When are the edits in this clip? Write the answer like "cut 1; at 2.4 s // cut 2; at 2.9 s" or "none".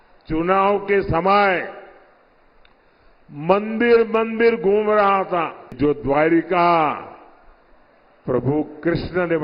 cut 1; at 5.8 s